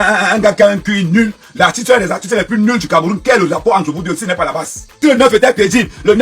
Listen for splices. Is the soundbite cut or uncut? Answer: cut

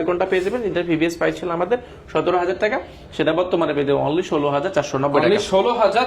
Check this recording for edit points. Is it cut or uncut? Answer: uncut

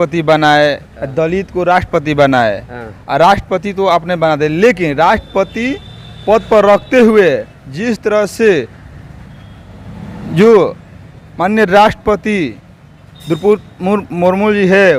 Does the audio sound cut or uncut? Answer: uncut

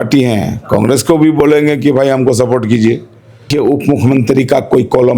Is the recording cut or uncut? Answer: cut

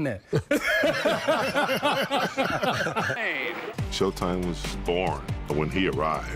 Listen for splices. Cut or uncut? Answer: uncut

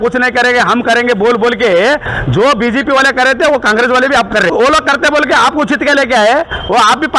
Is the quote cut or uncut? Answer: cut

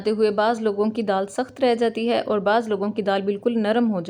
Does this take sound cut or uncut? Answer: uncut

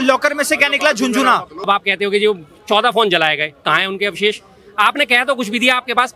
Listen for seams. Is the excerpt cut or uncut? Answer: cut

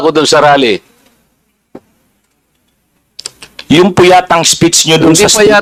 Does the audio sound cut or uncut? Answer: uncut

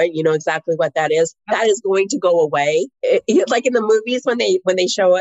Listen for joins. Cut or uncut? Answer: cut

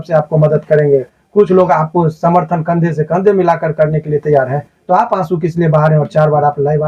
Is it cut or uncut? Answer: uncut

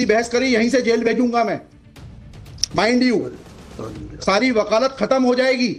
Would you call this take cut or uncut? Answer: uncut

